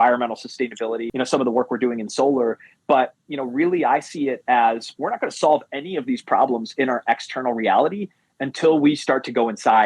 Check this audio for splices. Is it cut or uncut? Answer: cut